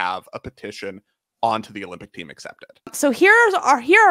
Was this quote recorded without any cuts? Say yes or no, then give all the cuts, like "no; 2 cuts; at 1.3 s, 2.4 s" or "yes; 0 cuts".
no; 1 cut; at 2.9 s